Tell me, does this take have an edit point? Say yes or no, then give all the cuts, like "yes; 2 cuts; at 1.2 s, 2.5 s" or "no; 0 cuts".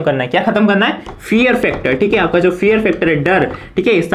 no; 0 cuts